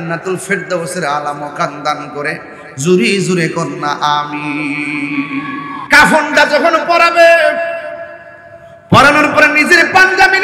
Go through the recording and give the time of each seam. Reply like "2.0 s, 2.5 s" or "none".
5.8 s